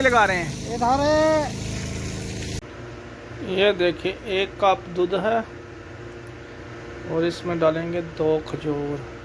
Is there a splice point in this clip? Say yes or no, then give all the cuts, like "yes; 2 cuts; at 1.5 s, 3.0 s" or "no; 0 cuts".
yes; 1 cut; at 2.6 s